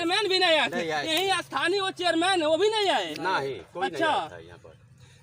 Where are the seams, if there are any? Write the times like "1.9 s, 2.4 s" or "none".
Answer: none